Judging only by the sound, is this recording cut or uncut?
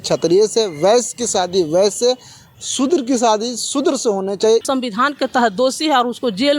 cut